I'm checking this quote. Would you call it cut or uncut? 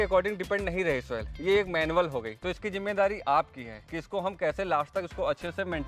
uncut